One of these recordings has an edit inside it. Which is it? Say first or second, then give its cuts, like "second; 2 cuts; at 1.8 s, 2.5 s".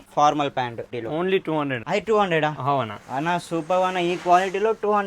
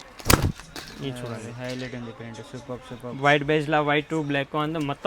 first; 2 cuts; at 0.9 s, 1.8 s